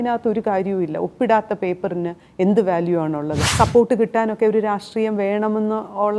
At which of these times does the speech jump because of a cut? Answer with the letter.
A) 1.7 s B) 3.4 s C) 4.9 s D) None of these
B